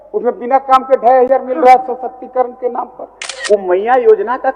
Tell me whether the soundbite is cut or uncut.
cut